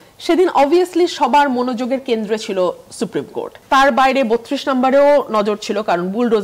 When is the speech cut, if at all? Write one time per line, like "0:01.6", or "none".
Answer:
0:03.6